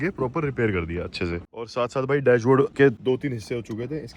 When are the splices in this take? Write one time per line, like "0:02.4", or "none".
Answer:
0:01.7
0:02.8